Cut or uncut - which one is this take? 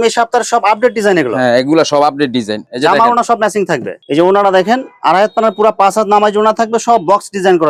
uncut